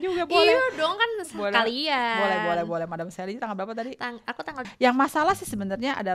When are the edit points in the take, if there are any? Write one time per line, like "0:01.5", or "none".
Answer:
0:04.5